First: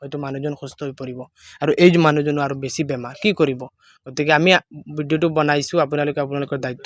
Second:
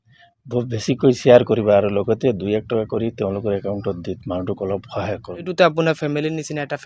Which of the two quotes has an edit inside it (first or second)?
second